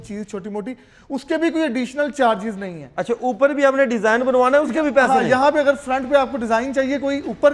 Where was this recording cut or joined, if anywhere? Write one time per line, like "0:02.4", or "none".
none